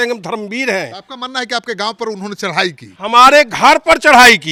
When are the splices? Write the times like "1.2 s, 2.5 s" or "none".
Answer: none